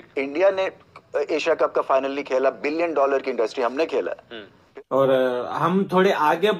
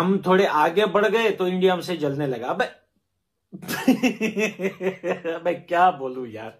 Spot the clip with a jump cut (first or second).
first